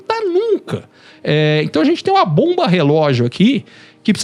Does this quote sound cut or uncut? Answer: uncut